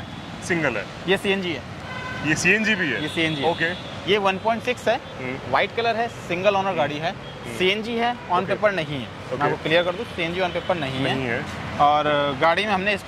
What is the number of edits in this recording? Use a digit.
0